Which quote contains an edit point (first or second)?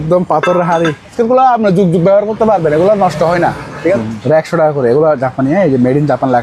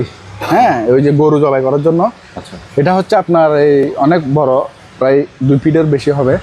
first